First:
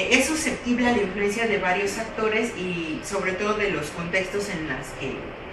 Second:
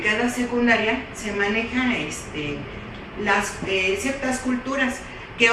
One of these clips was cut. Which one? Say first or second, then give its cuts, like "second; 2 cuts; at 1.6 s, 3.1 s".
second; 1 cut; at 3.1 s